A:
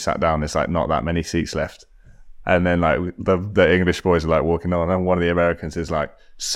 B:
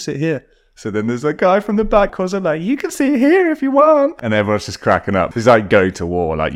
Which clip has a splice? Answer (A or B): B